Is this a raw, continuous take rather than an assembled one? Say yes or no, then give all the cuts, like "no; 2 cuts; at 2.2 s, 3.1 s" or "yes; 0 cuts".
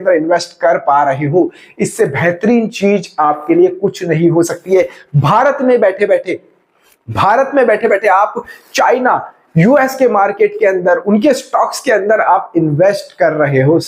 yes; 0 cuts